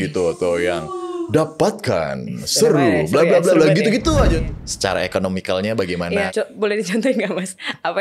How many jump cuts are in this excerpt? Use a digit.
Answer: 2